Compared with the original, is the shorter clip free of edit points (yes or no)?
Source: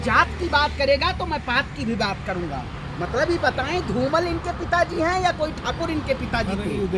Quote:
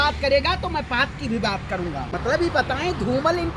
no